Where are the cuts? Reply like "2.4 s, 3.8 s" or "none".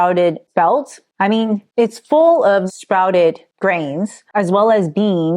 2.7 s